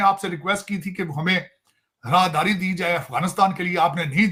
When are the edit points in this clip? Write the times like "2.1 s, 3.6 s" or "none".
none